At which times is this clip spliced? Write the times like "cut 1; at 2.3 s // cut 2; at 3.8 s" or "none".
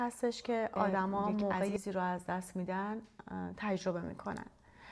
cut 1; at 1.7 s